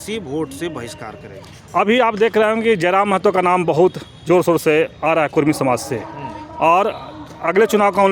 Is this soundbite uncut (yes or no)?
yes